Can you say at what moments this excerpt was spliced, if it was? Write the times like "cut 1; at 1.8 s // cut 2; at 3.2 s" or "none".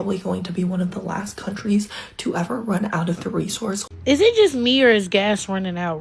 cut 1; at 3.8 s

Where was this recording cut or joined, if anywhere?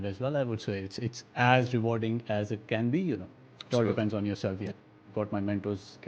cut 1; at 5.0 s

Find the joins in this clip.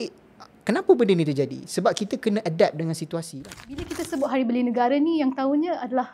cut 1; at 3.9 s

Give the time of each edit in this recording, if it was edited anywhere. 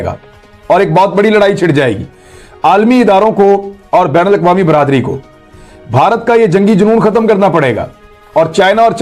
none

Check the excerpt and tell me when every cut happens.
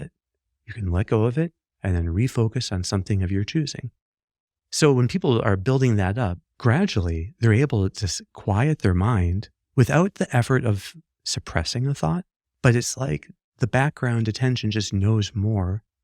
cut 1; at 6.5 s // cut 2; at 12.4 s

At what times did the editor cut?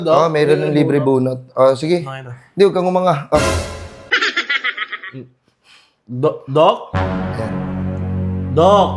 none

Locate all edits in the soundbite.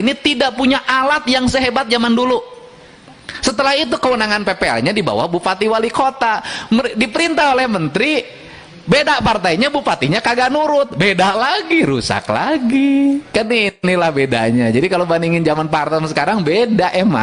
none

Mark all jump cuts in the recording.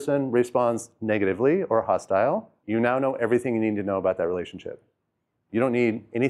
cut 1; at 2.5 s

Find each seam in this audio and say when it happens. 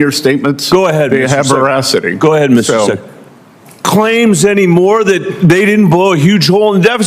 cut 1; at 3.1 s

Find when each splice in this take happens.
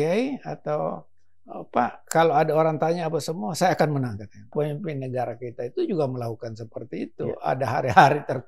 cut 1; at 4.5 s

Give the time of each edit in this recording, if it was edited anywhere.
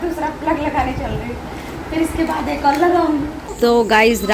cut 1; at 3.4 s

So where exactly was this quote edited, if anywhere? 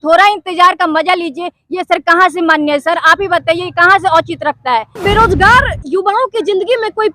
cut 1; at 5.0 s

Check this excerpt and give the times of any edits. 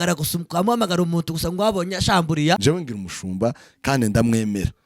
cut 1; at 2.6 s

